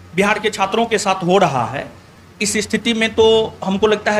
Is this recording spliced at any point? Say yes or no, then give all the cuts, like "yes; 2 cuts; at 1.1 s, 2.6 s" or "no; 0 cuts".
no; 0 cuts